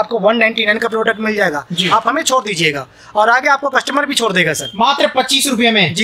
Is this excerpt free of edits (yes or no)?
no